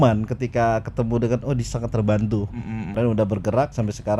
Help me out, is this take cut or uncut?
cut